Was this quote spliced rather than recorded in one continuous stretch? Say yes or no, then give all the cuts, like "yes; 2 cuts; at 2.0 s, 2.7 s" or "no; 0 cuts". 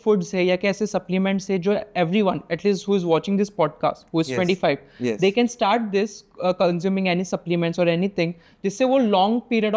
no; 0 cuts